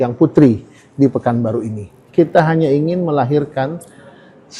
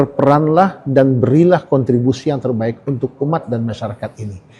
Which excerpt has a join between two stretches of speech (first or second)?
first